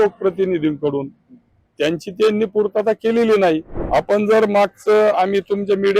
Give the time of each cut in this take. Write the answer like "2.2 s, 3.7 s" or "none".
3.7 s